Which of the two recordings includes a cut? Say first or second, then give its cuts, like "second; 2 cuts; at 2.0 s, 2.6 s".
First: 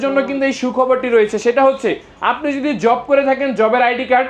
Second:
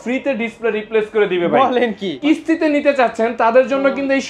second; 1 cut; at 2.2 s